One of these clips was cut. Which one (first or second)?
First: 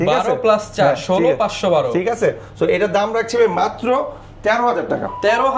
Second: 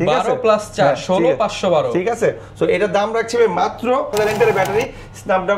second